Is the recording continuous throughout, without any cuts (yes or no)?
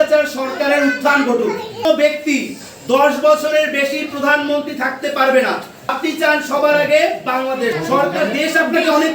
no